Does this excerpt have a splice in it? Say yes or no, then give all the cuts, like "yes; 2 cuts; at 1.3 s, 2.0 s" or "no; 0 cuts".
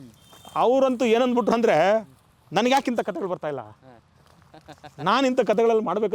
no; 0 cuts